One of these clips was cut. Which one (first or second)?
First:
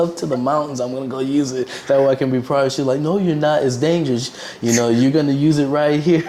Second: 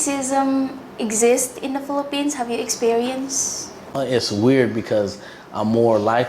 second